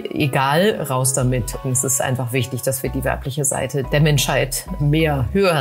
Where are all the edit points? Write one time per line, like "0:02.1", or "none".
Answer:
0:01.6
0:03.9
0:04.8